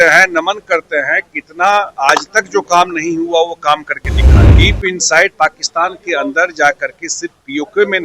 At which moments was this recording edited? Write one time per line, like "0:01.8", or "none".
0:04.5